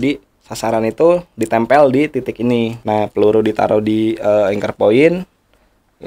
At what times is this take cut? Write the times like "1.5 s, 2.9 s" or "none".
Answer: 2.8 s